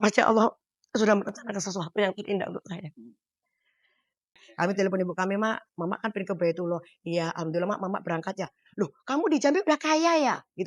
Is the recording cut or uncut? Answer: cut